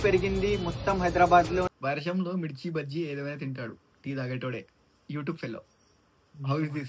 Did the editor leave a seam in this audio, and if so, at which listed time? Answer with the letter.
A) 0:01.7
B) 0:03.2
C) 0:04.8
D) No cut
A